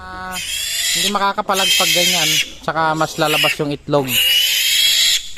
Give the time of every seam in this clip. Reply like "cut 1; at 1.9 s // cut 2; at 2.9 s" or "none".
none